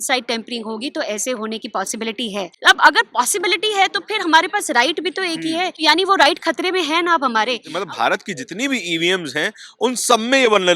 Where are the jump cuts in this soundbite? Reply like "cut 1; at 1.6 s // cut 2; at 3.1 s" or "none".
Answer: cut 1; at 2.5 s // cut 2; at 5.8 s // cut 3; at 7.7 s